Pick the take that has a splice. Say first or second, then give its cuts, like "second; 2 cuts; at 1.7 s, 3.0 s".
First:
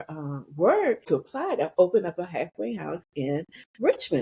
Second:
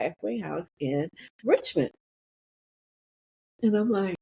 first; 1 cut; at 1.1 s